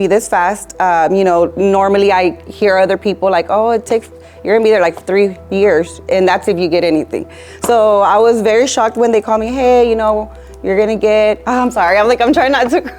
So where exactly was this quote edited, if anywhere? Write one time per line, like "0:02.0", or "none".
0:11.4